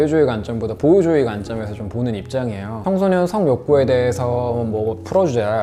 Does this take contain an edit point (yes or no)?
no